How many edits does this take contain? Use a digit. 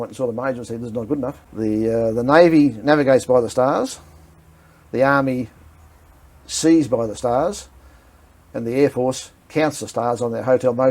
1